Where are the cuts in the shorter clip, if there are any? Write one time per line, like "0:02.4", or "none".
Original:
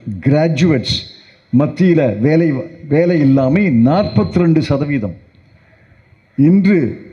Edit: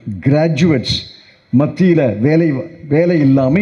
none